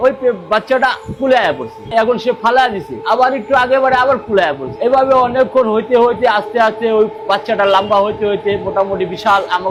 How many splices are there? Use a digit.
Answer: 0